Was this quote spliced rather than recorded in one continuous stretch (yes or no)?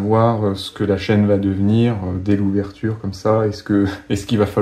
no